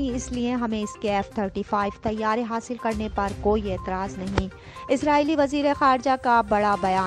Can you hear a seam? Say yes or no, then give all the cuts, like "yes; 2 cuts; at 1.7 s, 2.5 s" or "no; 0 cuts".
no; 0 cuts